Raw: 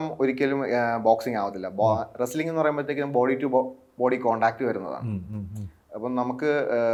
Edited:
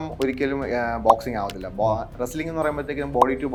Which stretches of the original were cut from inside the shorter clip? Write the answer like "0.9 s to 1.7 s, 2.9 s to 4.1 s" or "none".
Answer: none